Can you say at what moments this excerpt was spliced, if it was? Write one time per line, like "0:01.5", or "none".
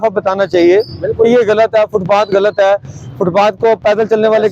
none